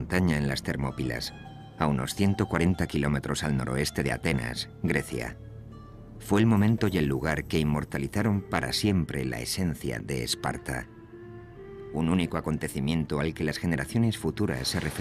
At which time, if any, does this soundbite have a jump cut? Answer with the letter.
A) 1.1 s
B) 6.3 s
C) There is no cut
B